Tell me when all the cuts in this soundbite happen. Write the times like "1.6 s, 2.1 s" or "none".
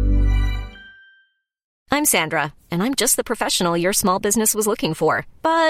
1.8 s